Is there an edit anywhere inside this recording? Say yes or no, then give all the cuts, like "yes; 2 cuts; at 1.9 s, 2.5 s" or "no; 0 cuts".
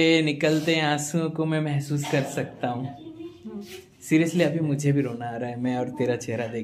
no; 0 cuts